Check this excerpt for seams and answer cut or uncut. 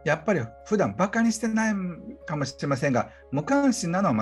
uncut